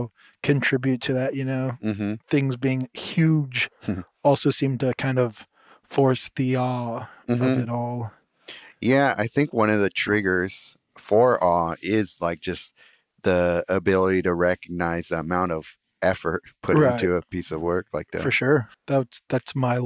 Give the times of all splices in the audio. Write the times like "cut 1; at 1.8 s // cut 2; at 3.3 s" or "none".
cut 1; at 18.7 s